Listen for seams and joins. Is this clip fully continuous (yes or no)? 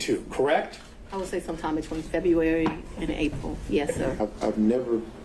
no